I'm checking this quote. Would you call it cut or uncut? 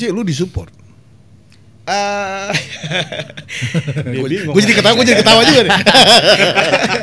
uncut